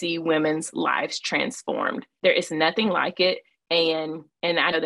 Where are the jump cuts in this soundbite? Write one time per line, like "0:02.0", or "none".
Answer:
none